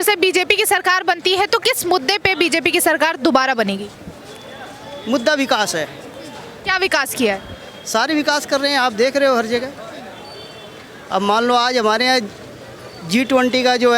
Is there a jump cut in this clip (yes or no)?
no